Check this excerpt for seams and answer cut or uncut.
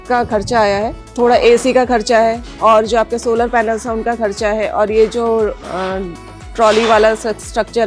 uncut